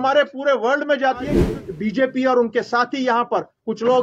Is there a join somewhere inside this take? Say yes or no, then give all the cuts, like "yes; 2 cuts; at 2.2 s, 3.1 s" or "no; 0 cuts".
yes; 1 cut; at 1.7 s